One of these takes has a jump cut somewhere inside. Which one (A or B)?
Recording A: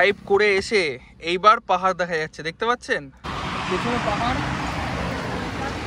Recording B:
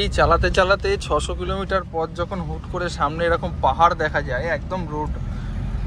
A